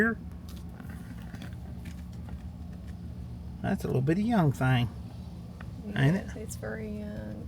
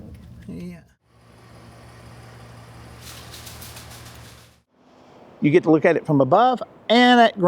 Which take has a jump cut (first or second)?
second